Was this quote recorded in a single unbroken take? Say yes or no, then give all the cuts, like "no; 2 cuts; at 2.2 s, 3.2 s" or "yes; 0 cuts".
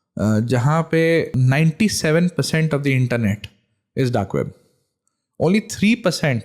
no; 1 cut; at 1.3 s